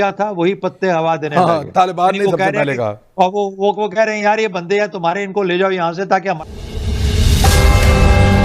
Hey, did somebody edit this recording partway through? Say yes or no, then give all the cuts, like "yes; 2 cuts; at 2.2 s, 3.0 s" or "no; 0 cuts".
yes; 1 cut; at 6.4 s